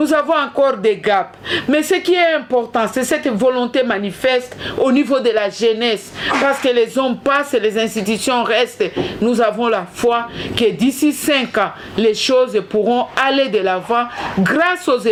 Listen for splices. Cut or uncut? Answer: uncut